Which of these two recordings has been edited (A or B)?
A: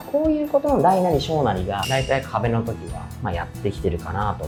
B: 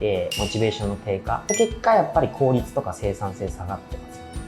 B